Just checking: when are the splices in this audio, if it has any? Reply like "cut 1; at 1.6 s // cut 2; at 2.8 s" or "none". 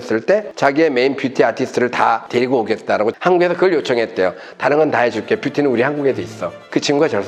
none